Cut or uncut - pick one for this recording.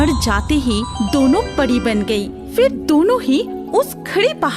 uncut